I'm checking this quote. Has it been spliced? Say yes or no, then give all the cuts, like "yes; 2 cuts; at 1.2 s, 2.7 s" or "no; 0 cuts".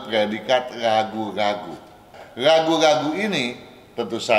yes; 1 cut; at 2.2 s